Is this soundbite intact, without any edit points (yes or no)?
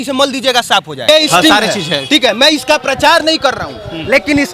no